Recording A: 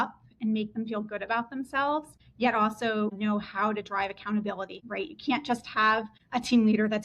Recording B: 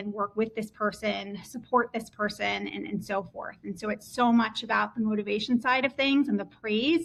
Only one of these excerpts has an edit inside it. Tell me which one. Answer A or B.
A